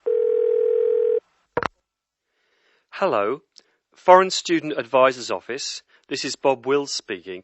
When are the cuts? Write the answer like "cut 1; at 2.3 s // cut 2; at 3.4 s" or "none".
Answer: cut 1; at 1.0 s